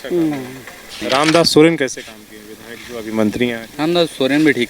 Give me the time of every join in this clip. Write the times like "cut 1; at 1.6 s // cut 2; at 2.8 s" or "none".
cut 1; at 1.0 s // cut 2; at 3.7 s